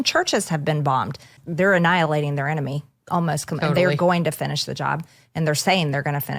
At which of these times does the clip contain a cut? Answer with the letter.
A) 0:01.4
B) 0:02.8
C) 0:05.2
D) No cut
A